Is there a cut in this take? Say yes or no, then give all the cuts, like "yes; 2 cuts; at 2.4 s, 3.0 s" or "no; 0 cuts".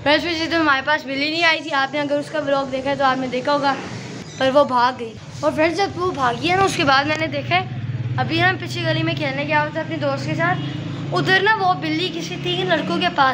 yes; 2 cuts; at 4.1 s, 5.1 s